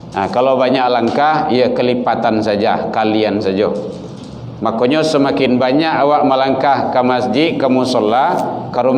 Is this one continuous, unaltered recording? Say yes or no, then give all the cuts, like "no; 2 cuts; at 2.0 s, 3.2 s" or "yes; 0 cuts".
yes; 0 cuts